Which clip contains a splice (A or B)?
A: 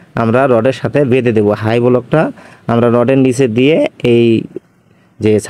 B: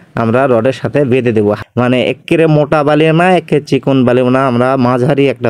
B